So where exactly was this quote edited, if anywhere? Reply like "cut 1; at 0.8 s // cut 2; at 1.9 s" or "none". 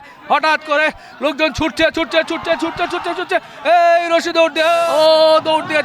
cut 1; at 4.9 s